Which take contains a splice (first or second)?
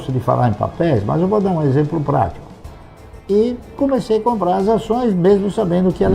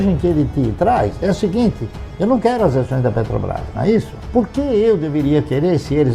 first